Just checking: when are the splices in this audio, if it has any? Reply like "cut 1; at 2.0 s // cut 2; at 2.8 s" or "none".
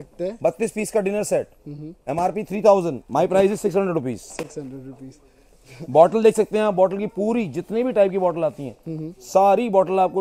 none